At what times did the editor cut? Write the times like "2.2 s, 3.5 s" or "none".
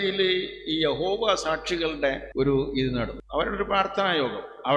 2.2 s, 3.2 s